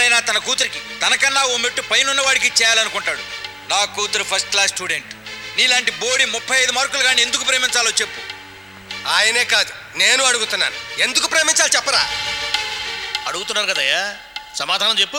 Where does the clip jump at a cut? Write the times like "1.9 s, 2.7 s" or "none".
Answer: none